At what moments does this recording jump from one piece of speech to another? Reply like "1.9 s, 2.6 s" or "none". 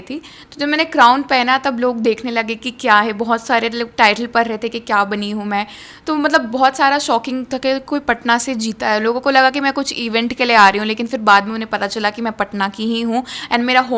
none